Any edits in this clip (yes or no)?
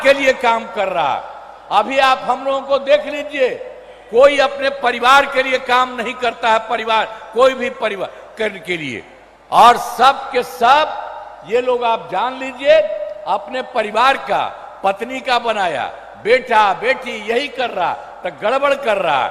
no